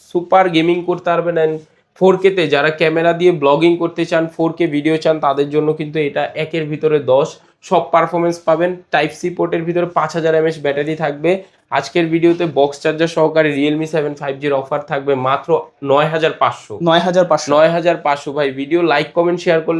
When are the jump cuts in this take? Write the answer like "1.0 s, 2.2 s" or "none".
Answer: none